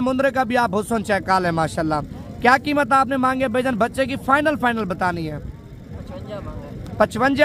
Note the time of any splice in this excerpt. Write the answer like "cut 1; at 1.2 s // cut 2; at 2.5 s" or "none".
none